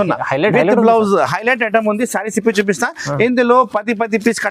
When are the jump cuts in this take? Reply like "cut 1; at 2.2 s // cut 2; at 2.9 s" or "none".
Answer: none